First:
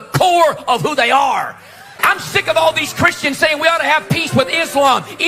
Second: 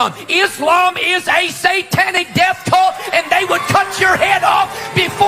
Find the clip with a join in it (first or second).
first